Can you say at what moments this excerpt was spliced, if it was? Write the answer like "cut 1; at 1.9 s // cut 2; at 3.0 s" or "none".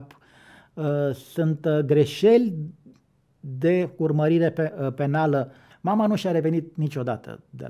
cut 1; at 5.6 s

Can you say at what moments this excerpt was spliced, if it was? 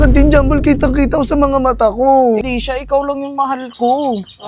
cut 1; at 2.4 s

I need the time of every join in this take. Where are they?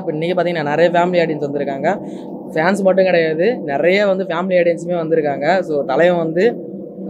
none

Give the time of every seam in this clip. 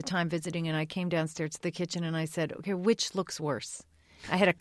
none

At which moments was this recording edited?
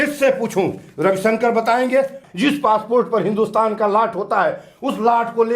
cut 1; at 2.2 s

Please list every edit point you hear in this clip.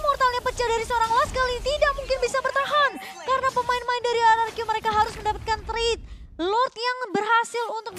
none

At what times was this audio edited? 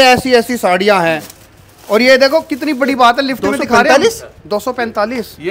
none

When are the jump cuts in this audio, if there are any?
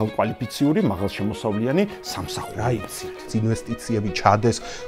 cut 1; at 3.3 s

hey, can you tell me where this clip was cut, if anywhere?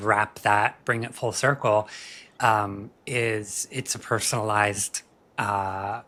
none

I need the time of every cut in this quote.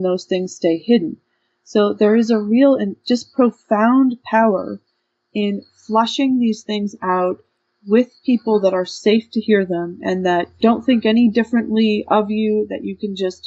cut 1; at 2.9 s // cut 2; at 10.6 s

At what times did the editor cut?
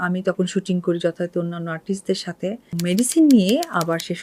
cut 1; at 2.7 s

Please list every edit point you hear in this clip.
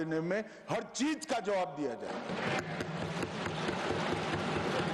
none

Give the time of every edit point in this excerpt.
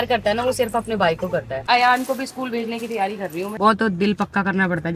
cut 1; at 1.6 s // cut 2; at 3.6 s

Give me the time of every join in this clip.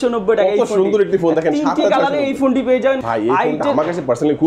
cut 1; at 3.0 s

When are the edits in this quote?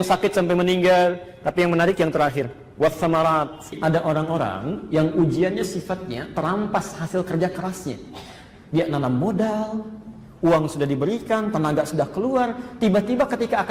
cut 1; at 3.8 s

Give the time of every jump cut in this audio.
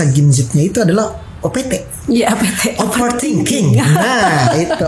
none

